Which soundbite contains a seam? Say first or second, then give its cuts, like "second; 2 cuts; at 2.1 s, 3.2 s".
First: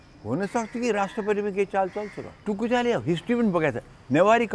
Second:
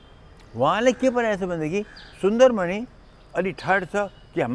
first; 1 cut; at 2.5 s